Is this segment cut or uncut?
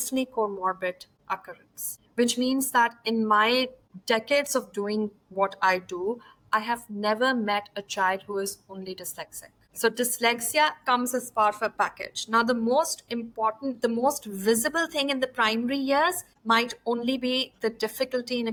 uncut